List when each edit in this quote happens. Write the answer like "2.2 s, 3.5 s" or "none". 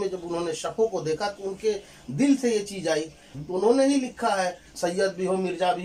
3.2 s, 4.7 s